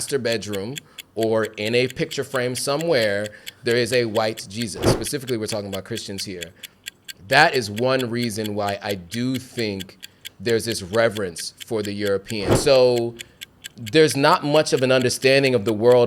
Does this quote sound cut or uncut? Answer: cut